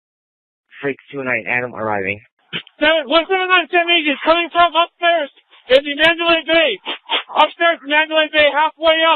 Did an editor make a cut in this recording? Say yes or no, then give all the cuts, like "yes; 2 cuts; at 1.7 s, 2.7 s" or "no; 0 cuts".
yes; 1 cut; at 6.6 s